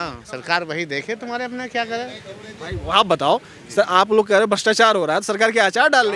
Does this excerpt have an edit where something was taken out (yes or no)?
no